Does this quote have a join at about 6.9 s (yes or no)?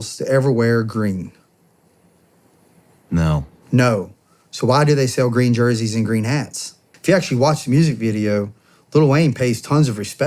yes